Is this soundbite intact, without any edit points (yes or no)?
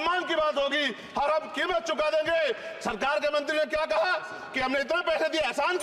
yes